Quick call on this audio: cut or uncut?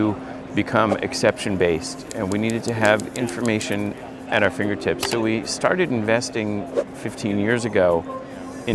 uncut